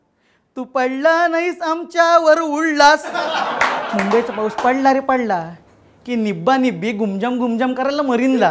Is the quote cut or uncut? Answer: cut